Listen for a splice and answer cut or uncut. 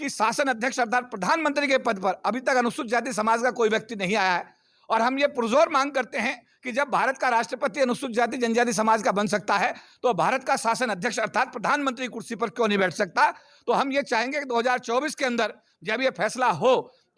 uncut